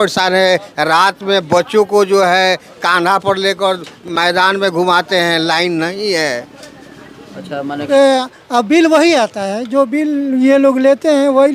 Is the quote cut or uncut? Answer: cut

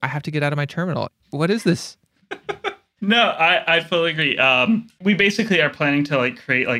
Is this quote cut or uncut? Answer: cut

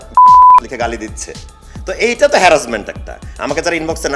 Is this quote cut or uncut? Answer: uncut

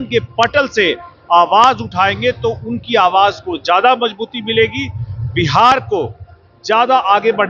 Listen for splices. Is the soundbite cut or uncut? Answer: uncut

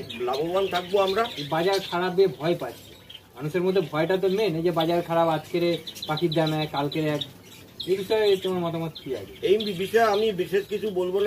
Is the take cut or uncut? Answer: cut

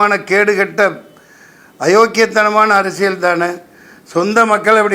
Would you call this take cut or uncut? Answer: uncut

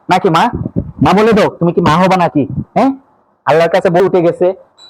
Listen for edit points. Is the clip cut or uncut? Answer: cut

